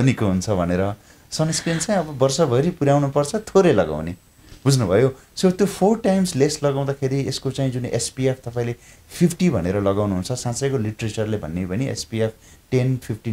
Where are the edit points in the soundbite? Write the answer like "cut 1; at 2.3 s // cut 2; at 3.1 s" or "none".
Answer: none